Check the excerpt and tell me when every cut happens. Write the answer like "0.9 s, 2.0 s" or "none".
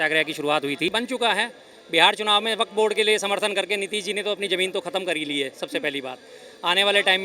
0.9 s